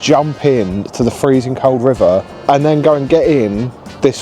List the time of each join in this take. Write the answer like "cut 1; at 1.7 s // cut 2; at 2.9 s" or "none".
cut 1; at 2.3 s